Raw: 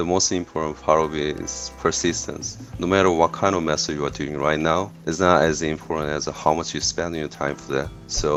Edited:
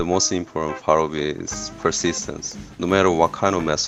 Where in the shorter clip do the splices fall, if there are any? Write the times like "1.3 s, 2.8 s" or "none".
none